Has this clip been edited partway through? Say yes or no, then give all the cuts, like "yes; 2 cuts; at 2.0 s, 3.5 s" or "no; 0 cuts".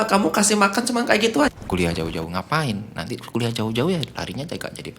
yes; 1 cut; at 1.5 s